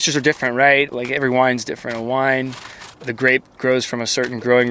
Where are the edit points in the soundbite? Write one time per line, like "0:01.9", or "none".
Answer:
0:00.9
0:03.0